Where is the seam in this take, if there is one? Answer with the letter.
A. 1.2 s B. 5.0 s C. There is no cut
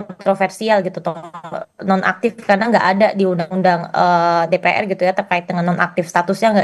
C